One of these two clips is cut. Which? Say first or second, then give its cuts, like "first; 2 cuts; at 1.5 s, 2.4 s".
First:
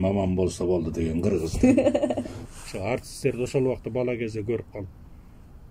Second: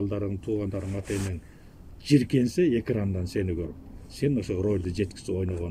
first; 1 cut; at 2.4 s